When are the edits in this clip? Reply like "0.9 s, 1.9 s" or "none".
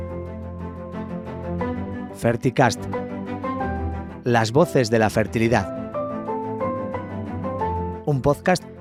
none